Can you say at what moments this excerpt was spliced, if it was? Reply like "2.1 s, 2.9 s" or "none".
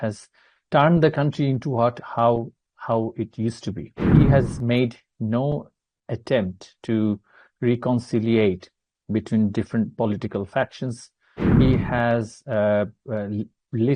4.1 s